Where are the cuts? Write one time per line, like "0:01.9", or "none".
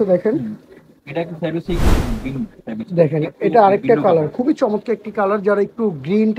none